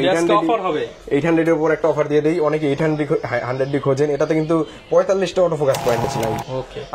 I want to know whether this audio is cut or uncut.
cut